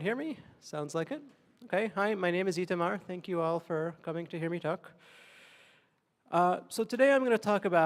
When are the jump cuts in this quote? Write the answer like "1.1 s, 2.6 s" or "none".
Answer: none